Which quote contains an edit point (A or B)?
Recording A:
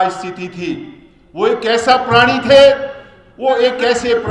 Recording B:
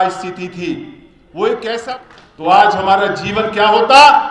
B